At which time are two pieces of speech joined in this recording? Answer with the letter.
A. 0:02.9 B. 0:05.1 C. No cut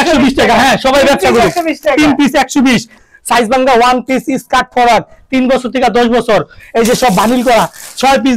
A